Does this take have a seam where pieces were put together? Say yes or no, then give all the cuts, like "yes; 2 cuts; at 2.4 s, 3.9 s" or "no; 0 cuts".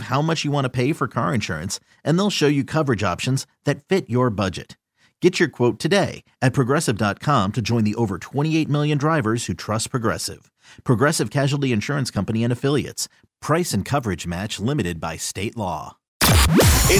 yes; 1 cut; at 16.0 s